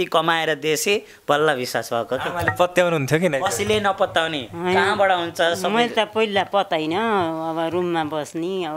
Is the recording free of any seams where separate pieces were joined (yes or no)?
yes